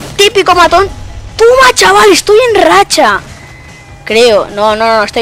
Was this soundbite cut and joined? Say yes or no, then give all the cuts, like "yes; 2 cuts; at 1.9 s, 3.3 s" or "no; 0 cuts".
no; 0 cuts